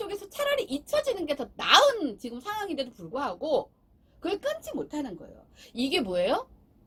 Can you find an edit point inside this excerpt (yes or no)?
no